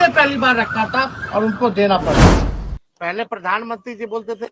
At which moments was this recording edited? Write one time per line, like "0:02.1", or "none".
0:02.5